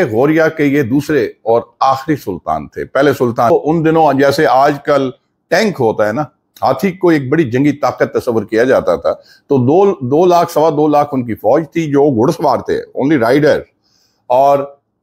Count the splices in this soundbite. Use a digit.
1